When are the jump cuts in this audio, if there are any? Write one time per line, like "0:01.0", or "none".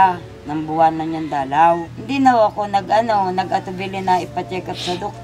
0:02.0